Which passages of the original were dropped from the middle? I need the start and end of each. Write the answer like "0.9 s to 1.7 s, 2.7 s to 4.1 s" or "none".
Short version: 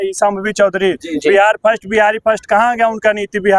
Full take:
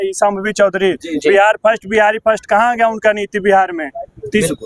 none